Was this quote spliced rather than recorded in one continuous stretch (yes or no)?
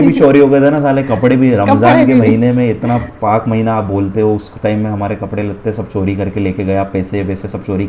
no